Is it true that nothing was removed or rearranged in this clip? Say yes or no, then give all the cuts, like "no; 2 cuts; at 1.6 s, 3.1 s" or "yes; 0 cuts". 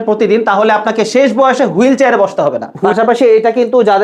no; 1 cut; at 2.7 s